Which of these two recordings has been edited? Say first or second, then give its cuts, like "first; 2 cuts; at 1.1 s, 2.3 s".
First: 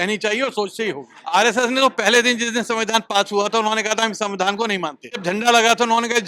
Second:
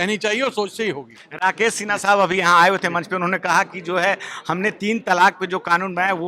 first; 2 cuts; at 1.1 s, 5.1 s